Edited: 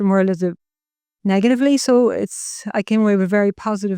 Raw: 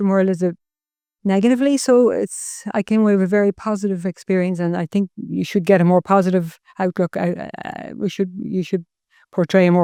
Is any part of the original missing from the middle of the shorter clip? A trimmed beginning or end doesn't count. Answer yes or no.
no